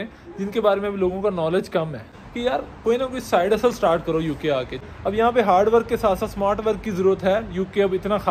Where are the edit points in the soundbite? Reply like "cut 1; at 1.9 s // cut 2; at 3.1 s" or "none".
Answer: cut 1; at 2.1 s // cut 2; at 4.8 s